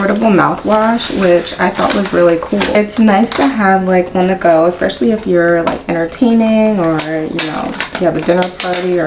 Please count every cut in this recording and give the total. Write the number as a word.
zero